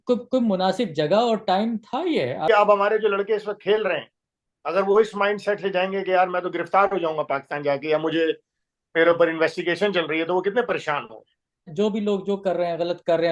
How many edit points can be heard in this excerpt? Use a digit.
2